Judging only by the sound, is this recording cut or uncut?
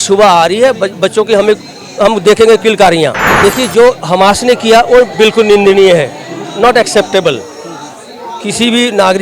cut